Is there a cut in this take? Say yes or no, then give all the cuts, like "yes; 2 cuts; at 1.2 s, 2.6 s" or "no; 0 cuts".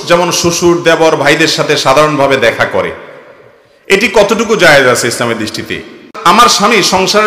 yes; 1 cut; at 6.1 s